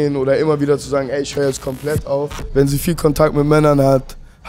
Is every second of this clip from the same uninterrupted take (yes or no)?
no